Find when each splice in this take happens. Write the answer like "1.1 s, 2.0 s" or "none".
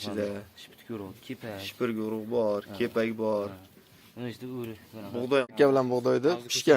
5.5 s